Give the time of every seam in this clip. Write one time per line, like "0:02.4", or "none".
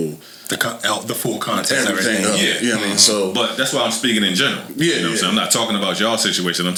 none